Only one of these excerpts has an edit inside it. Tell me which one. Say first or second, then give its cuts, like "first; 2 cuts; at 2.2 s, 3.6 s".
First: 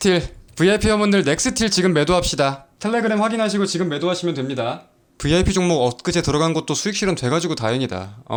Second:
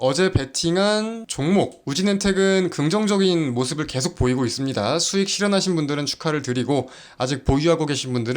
second; 2 cuts; at 1.3 s, 1.8 s